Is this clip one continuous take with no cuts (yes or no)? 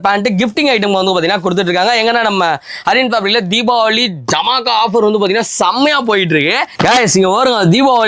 no